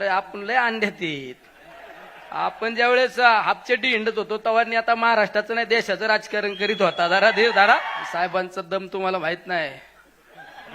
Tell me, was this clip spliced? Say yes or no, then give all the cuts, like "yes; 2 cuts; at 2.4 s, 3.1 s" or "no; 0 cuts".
yes; 1 cut; at 8.0 s